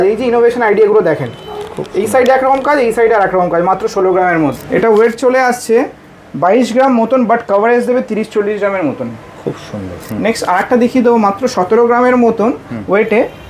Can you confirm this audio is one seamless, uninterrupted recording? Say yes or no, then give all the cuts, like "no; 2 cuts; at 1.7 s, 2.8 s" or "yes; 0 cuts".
no; 2 cuts; at 4.6 s, 10.1 s